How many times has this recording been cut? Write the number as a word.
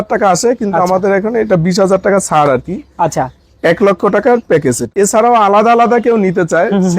one